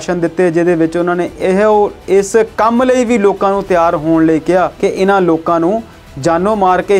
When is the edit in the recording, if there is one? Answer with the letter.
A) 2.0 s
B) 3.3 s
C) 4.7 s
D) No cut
C